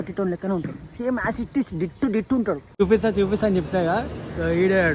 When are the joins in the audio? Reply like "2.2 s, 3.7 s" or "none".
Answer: 2.8 s